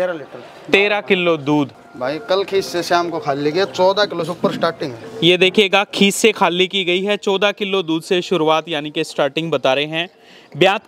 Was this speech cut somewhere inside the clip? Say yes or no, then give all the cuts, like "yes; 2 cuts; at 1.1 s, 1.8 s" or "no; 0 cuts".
yes; 1 cut; at 1.8 s